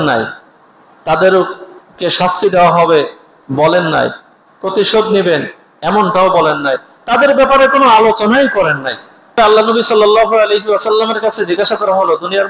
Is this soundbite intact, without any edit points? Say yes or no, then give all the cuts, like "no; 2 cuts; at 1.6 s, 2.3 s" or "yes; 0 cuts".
no; 1 cut; at 9.4 s